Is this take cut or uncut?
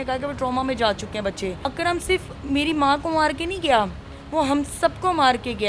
uncut